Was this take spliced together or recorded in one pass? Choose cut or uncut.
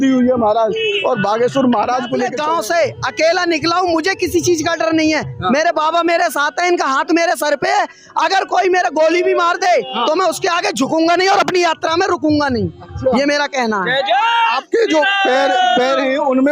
cut